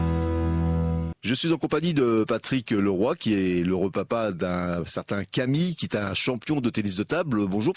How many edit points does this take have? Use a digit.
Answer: 1